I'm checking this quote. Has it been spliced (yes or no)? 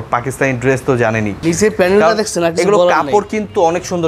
yes